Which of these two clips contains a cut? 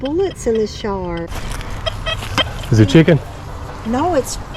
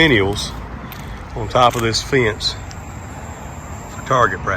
first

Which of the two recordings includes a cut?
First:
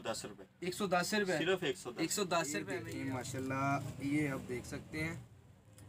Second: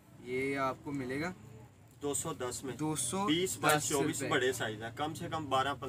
first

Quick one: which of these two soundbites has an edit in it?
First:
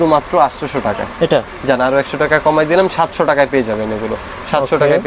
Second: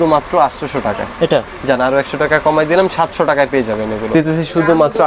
second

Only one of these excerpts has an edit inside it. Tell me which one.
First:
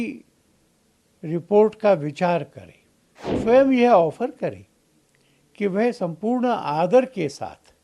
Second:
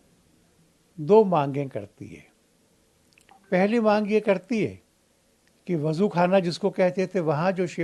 first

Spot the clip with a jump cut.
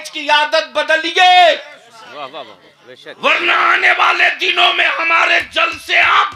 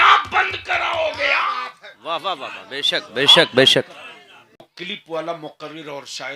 second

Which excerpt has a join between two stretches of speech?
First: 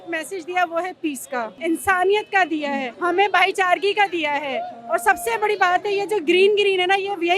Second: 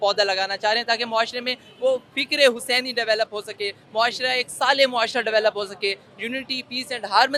first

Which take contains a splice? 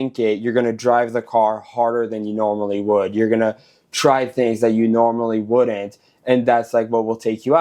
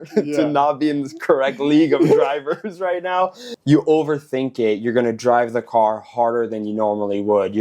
second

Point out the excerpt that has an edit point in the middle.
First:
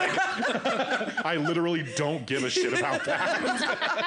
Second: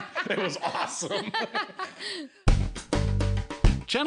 second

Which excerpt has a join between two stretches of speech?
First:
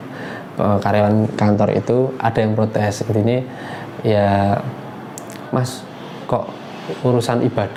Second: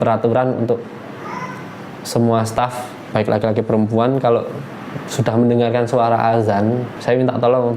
second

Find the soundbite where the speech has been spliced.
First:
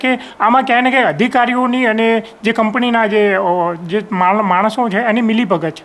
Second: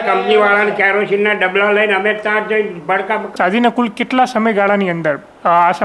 second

